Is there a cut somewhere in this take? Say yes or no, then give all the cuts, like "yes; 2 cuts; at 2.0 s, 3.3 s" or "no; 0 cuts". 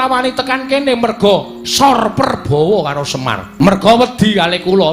yes; 1 cut; at 3.6 s